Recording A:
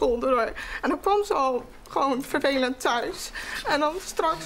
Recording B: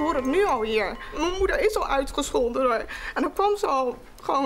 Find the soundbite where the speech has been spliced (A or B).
B